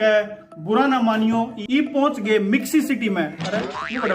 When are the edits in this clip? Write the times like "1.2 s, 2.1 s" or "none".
1.6 s